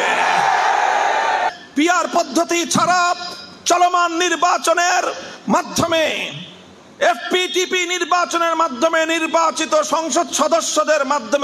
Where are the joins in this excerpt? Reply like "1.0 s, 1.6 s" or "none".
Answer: 1.5 s